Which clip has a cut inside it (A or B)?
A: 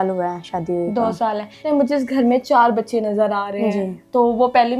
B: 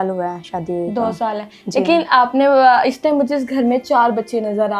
A